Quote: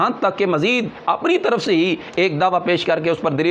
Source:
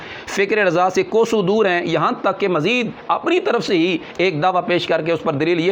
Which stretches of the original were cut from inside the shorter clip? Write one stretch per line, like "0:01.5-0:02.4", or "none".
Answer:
none

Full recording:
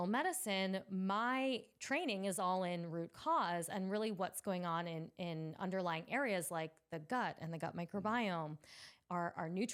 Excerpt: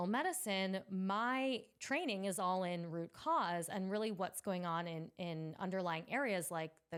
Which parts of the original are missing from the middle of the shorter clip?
none

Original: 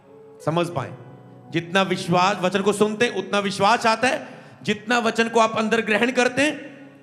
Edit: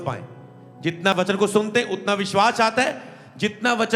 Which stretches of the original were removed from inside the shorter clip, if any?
0:01.8-0:02.4

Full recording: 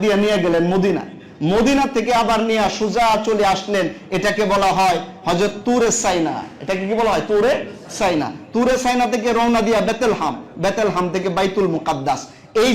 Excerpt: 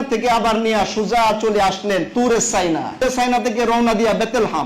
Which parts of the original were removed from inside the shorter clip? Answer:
0:03.9-0:05.6
0:06.5-0:08.7

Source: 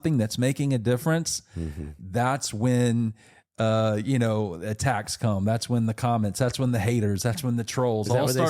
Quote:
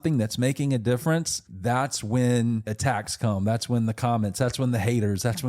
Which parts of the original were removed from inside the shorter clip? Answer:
0:01.4-0:01.9
0:03.2-0:04.7

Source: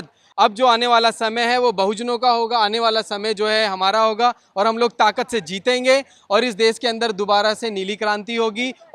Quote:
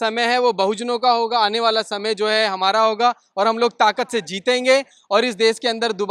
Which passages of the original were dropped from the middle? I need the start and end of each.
none

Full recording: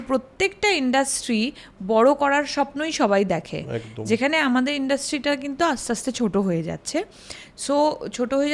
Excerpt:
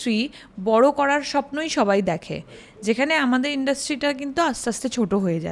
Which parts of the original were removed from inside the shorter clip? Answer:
none

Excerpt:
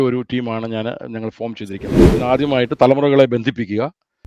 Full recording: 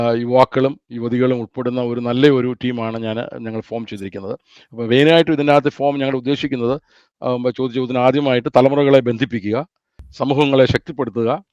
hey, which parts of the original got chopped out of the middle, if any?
0:04.4-0:07.8

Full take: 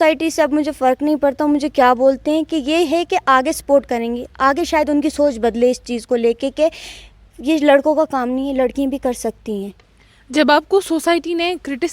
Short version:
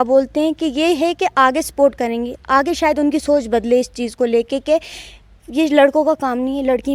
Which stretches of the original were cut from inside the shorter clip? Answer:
none

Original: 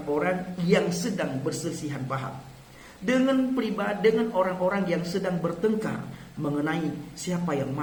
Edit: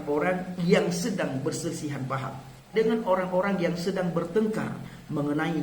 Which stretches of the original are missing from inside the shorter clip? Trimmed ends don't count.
0:02.7-0:04.0

